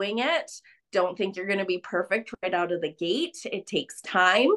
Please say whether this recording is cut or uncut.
uncut